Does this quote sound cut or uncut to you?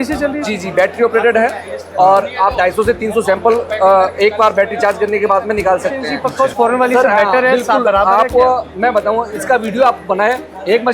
cut